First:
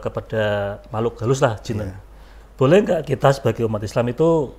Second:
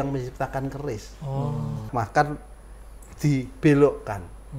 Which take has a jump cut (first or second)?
second